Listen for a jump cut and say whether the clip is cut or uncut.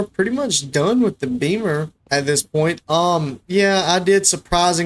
uncut